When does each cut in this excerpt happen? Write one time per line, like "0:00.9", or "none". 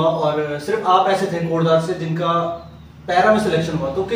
none